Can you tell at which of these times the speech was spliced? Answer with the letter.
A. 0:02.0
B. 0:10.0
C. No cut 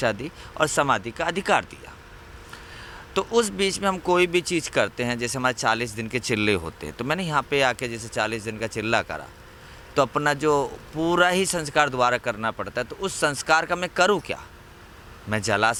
C